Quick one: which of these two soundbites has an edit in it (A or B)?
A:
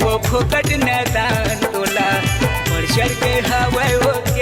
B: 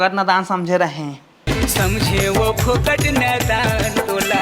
B